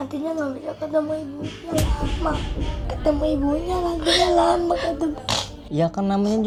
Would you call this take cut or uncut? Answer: uncut